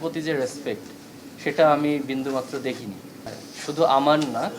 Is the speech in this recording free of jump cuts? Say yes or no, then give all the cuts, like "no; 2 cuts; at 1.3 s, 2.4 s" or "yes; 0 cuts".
no; 1 cut; at 3.4 s